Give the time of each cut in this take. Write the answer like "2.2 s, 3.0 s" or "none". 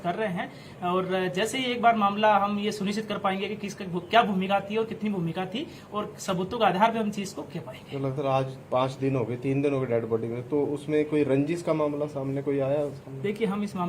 4.0 s, 10.1 s